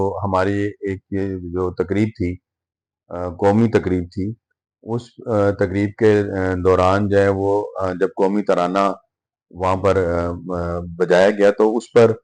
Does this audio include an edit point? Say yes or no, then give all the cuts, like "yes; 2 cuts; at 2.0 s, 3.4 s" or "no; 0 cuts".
no; 0 cuts